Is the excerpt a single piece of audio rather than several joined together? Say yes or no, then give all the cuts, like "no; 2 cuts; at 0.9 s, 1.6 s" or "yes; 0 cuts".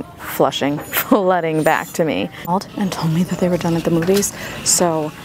no; 1 cut; at 2.5 s